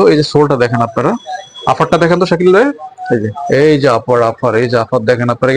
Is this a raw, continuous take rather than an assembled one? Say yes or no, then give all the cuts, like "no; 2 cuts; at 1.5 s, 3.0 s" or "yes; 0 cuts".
yes; 0 cuts